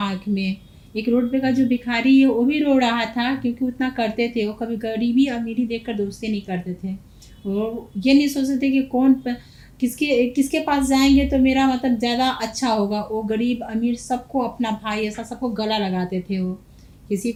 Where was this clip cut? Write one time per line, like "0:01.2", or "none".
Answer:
none

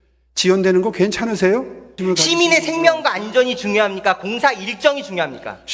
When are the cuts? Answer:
0:02.0

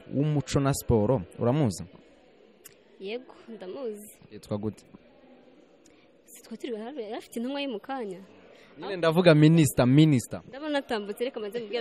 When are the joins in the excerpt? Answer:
none

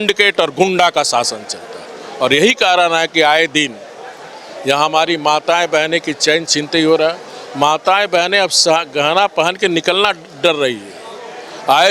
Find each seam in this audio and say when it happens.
none

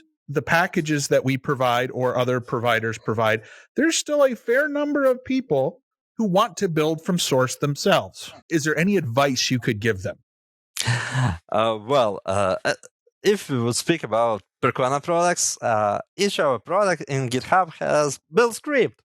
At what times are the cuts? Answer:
0:08.3

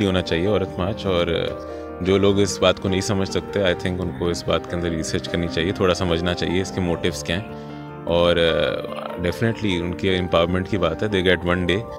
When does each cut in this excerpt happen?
none

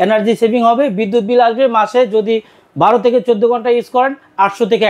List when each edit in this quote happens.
none

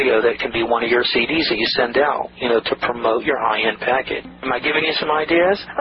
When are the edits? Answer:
0:04.3

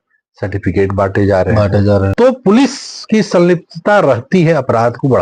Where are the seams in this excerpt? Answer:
0:02.1

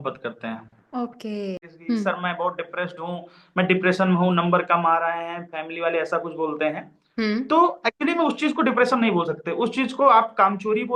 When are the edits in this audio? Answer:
0:01.7

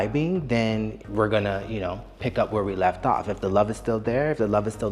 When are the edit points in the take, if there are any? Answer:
0:01.0

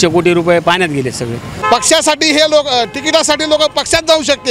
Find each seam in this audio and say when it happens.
0:01.5

